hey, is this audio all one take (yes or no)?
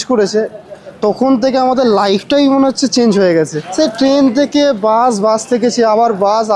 no